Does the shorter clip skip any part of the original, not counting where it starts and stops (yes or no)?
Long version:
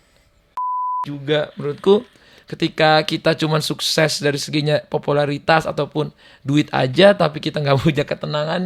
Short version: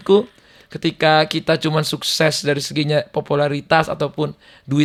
no